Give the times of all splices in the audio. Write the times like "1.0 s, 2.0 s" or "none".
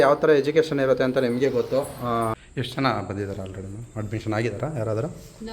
2.3 s